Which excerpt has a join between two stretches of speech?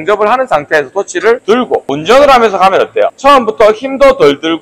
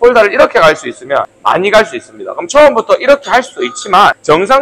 first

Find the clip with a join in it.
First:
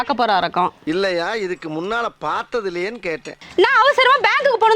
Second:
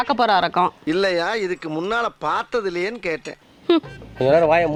first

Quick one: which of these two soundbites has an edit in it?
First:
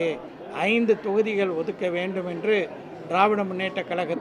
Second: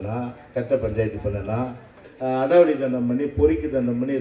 second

